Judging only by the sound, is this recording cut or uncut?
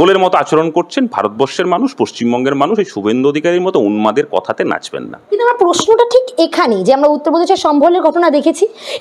uncut